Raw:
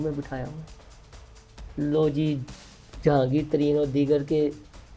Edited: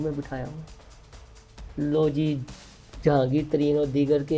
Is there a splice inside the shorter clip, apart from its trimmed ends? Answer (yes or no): no